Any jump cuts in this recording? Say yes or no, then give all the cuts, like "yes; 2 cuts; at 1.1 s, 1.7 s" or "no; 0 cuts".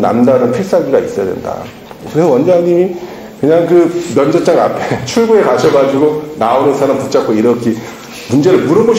yes; 1 cut; at 2.0 s